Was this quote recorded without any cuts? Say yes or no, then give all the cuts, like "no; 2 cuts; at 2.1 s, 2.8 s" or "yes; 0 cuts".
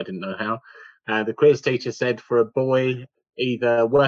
no; 1 cut; at 3.1 s